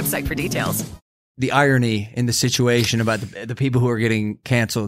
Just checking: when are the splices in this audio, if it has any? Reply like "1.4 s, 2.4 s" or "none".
1.2 s

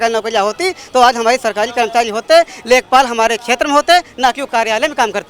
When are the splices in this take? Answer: none

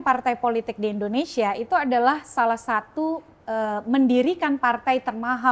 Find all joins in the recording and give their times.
none

